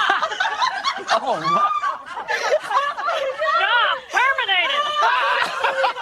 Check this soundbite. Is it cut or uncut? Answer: uncut